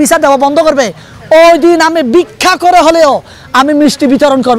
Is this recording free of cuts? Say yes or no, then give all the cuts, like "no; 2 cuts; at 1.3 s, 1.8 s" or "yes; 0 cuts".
yes; 0 cuts